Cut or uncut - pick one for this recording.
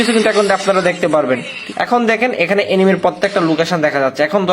cut